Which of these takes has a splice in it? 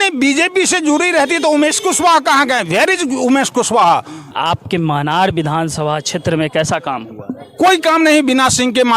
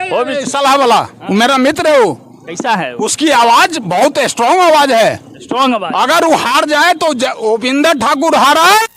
first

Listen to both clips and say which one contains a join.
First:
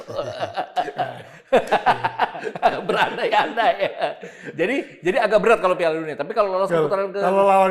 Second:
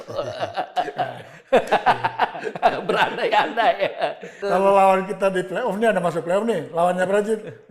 second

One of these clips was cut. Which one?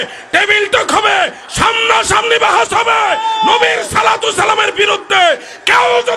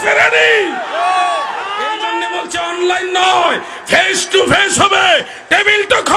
second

